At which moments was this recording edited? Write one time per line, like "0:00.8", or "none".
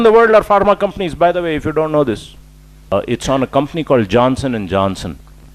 0:02.9